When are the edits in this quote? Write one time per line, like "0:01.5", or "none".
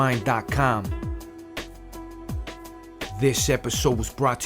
0:00.9
0:03.1